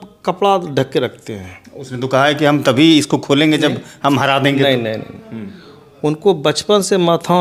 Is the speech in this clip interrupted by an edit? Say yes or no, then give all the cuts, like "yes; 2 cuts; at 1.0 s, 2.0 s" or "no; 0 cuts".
no; 0 cuts